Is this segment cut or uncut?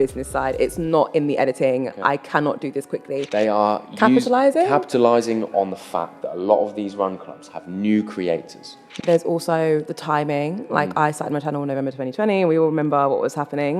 cut